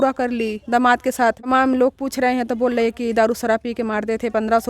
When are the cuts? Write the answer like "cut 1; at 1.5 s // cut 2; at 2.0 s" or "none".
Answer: cut 1; at 1.5 s